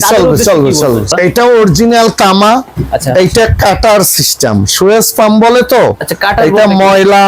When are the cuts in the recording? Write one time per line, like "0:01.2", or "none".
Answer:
0:01.1